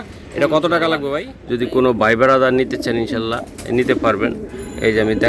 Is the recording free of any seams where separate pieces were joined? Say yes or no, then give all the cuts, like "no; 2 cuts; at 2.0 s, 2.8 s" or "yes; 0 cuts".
no; 1 cut; at 1.3 s